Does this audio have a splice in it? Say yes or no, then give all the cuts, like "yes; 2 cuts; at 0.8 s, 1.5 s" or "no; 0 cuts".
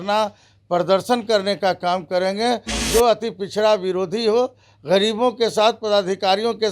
yes; 1 cut; at 2.7 s